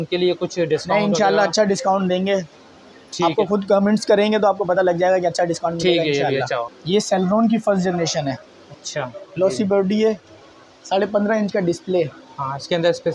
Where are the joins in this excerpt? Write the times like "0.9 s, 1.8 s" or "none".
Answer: none